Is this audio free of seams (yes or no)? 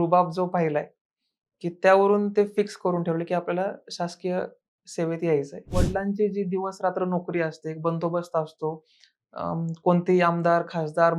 no